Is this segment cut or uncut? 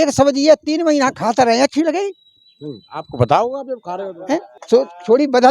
cut